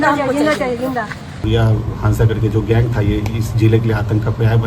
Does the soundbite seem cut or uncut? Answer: cut